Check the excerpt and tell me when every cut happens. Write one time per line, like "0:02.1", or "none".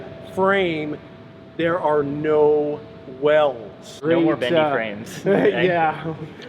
0:04.0